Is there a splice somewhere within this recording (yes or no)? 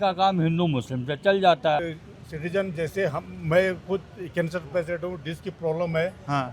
yes